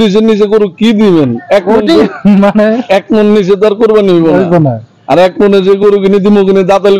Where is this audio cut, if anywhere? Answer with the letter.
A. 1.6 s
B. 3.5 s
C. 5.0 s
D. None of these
D